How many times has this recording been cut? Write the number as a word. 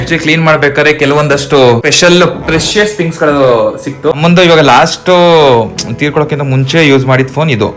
two